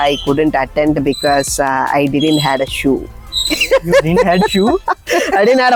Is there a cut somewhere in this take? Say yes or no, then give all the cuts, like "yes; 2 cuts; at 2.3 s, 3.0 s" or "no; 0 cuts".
no; 0 cuts